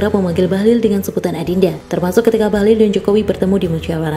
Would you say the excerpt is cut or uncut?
cut